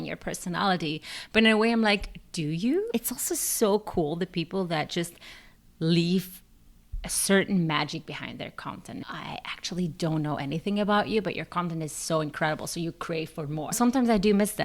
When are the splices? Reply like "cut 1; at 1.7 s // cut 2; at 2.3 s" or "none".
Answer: cut 1; at 2.9 s // cut 2; at 9.0 s // cut 3; at 13.8 s